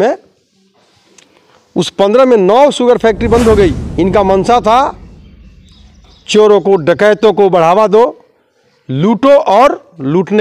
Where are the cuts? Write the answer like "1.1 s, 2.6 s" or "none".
3.8 s